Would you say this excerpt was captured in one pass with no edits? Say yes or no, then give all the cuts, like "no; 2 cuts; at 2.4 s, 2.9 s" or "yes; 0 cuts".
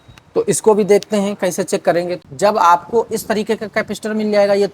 no; 1 cut; at 2.2 s